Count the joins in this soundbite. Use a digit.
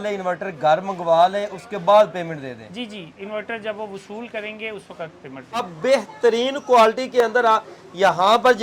1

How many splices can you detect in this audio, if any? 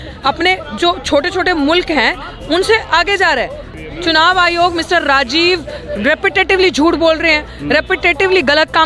1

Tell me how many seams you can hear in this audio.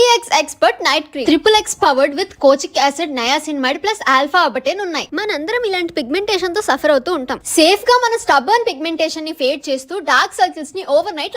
2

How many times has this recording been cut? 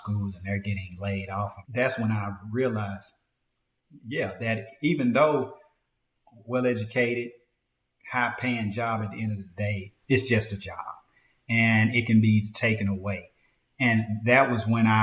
2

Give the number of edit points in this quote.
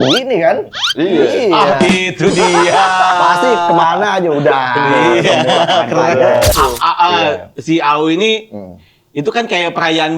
1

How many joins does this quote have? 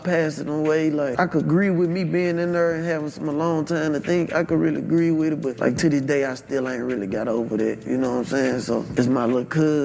3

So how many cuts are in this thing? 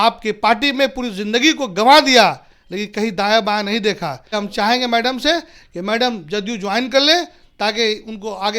1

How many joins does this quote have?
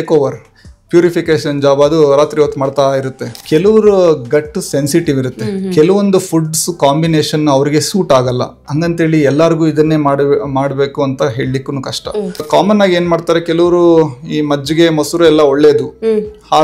2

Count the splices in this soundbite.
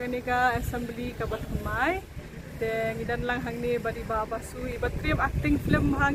0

